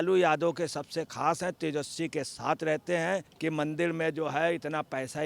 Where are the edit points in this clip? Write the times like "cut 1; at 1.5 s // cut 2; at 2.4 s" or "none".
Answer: cut 1; at 3.3 s